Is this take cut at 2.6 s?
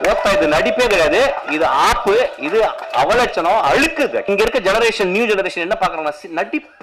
no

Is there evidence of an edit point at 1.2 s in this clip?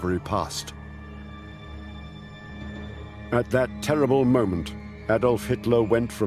no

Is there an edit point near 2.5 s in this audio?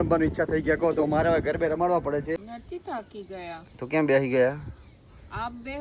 yes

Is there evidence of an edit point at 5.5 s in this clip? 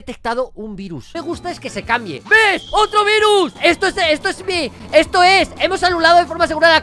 no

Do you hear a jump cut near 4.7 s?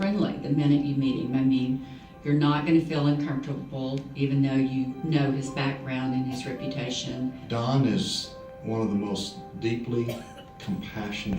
no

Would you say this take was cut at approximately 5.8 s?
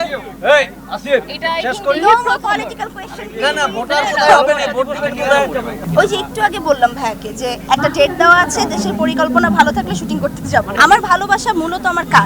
yes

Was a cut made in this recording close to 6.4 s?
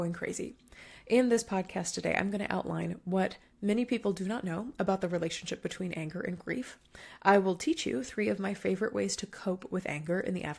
no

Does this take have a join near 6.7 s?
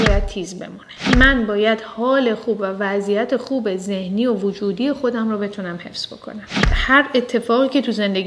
yes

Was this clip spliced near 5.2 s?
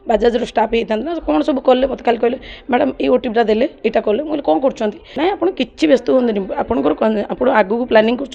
yes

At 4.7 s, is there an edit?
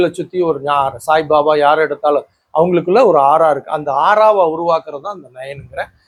no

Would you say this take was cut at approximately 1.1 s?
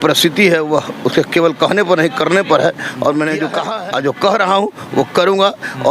no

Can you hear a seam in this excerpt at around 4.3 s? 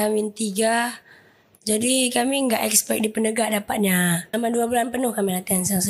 yes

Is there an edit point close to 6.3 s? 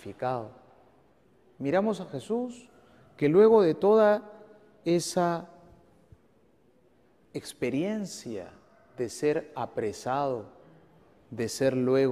no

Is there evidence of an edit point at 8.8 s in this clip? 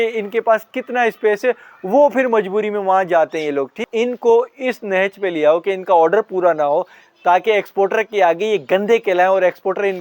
no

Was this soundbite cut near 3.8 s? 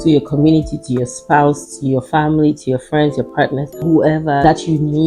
no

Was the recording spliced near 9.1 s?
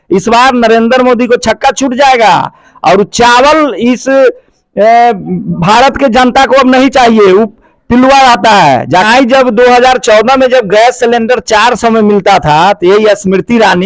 yes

